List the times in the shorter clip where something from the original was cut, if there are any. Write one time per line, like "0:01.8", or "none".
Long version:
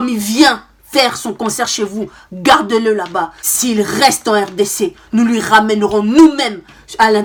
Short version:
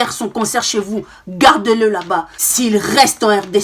none